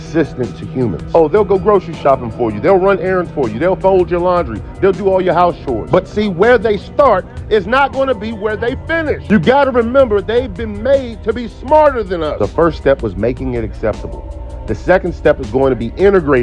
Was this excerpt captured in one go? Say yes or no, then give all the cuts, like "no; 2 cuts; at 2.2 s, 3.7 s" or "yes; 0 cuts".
no; 3 cuts; at 4.4 s, 9.7 s, 11.3 s